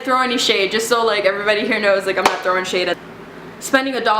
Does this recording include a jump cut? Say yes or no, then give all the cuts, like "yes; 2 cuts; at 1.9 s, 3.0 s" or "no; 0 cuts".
yes; 1 cut; at 3.0 s